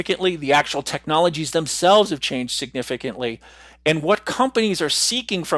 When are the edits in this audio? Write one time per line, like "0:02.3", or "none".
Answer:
none